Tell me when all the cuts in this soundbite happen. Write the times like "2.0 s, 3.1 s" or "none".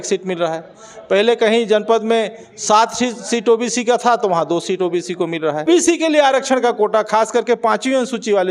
5.7 s